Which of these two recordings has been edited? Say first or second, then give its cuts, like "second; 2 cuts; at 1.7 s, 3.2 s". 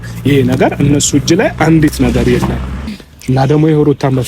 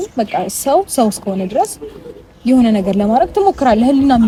first; 1 cut; at 2.8 s